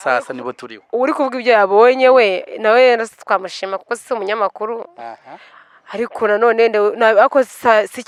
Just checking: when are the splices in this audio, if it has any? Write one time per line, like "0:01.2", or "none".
none